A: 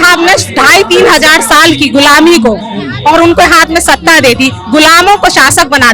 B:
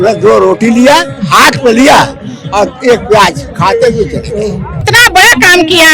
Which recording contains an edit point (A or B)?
B